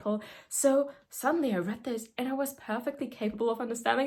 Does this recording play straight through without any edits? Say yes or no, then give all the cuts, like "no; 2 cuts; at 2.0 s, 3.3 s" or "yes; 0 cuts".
yes; 0 cuts